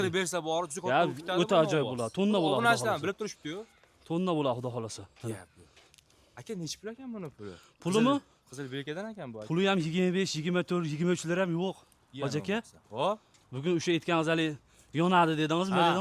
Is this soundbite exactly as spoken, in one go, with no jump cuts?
yes; 0 cuts

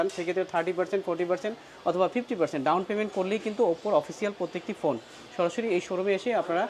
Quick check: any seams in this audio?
no; 0 cuts

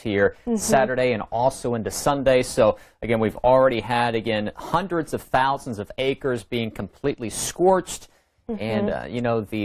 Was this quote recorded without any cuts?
no; 1 cut; at 4.9 s

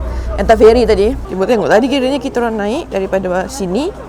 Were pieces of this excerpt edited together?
yes; 1 cut; at 1.2 s

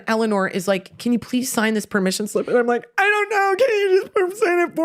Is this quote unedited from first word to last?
yes; 0 cuts

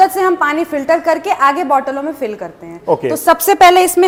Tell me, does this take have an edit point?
no; 0 cuts

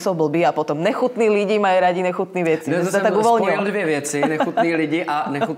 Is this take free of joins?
yes; 0 cuts

